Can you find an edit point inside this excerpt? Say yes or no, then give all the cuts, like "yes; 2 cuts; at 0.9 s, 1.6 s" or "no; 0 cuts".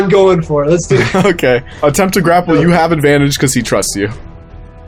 yes; 1 cut; at 1.7 s